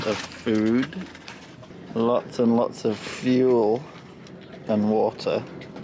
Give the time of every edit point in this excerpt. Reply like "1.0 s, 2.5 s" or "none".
none